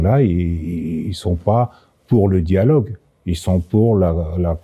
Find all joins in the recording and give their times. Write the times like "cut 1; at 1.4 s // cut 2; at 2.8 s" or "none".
none